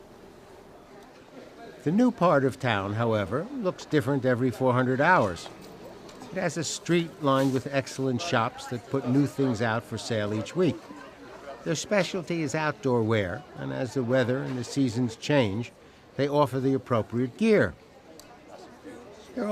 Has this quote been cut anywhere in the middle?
yes; 1 cut; at 15.5 s

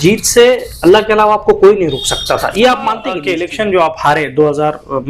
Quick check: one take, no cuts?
no; 1 cut; at 3.1 s

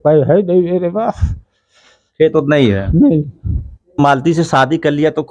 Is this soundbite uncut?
no; 1 cut; at 4.0 s

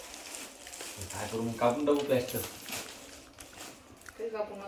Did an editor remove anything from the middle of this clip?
no; 0 cuts

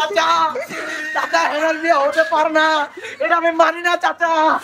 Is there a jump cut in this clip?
no; 0 cuts

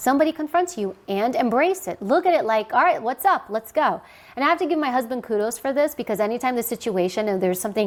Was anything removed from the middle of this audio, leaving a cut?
no; 0 cuts

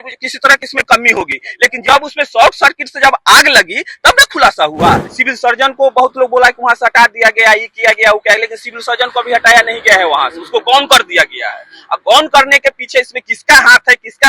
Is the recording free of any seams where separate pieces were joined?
no; 1 cut; at 5.1 s

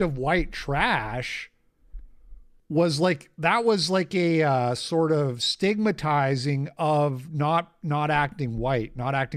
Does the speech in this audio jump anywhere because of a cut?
no; 0 cuts

